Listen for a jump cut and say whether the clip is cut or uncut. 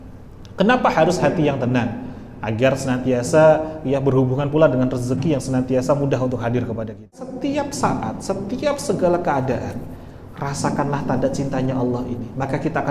cut